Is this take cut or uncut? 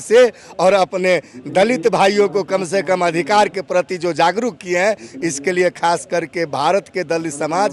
uncut